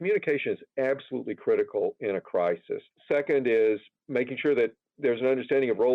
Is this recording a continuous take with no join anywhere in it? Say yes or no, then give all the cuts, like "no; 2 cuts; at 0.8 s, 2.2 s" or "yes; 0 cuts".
no; 2 cuts; at 2.9 s, 4.9 s